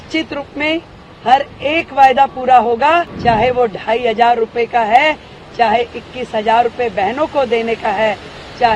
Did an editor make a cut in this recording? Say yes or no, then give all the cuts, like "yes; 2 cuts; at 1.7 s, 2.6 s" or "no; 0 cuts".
yes; 1 cut; at 3.1 s